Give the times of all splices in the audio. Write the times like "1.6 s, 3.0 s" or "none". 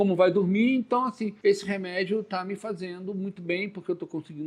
1.3 s

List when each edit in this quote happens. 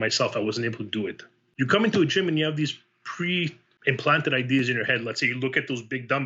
1.4 s, 3.7 s

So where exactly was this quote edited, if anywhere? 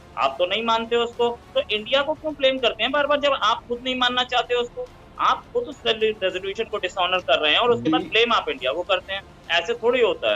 none

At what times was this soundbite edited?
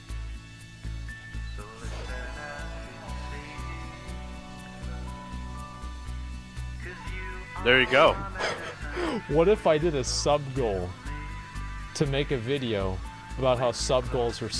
none

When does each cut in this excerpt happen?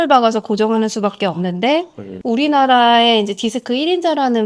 2.0 s

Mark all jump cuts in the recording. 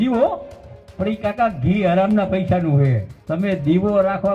3.1 s

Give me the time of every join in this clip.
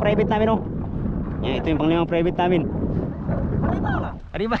3.1 s

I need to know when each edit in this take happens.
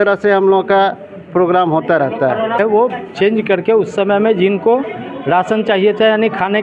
2.6 s

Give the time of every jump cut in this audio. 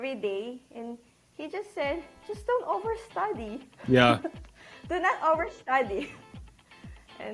none

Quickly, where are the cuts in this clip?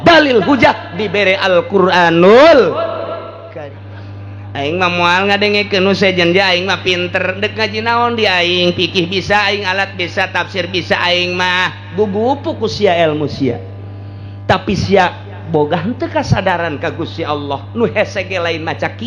3.4 s

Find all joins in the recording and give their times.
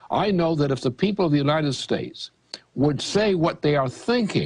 none

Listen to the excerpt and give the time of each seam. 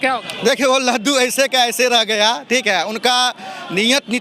none

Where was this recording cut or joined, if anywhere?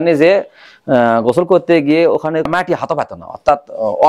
2.5 s

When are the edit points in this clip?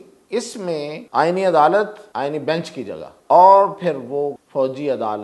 1.0 s, 2.0 s, 3.1 s, 4.4 s

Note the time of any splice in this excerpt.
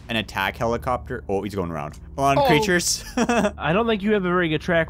3.6 s

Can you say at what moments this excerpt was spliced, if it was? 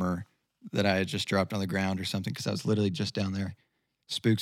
none

